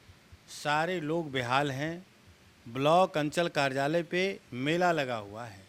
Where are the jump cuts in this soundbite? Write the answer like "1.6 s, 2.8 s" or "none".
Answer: none